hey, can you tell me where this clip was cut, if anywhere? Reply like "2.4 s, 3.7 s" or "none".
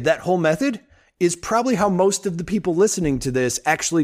none

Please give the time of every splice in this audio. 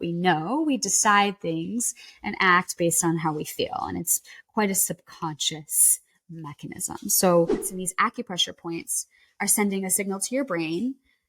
7.7 s

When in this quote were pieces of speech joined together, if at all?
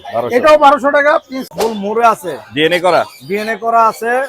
1.5 s

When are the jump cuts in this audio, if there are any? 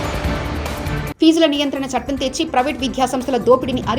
1.1 s

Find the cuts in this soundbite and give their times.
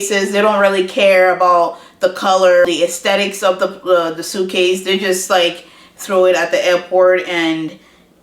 2.7 s

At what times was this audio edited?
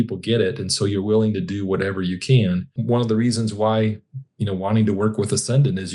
2.8 s

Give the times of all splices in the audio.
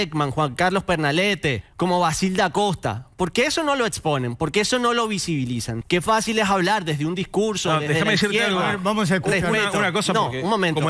1.7 s, 5.7 s

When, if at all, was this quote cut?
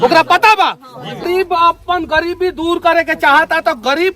1.3 s

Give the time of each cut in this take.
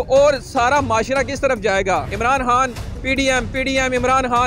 2.1 s

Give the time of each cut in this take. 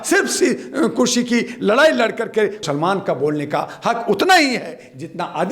2.6 s

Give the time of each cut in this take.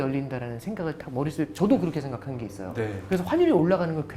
3.0 s

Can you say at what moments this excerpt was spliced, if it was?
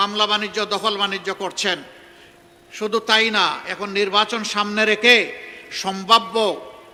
none

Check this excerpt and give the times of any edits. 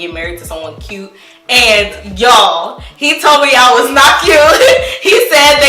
none

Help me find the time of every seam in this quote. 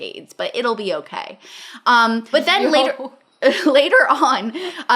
2.3 s

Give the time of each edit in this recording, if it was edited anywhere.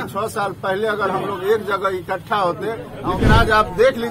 2.9 s

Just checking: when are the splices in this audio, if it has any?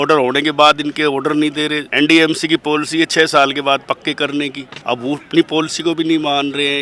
1.8 s, 4.7 s

